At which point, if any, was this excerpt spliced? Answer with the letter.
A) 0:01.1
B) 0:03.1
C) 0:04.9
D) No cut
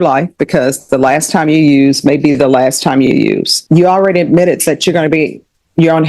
B